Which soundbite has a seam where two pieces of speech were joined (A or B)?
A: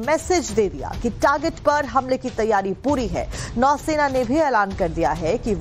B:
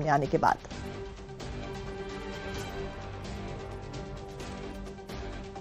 B